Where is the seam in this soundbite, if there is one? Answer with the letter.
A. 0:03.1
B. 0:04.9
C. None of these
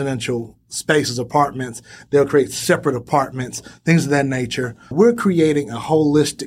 B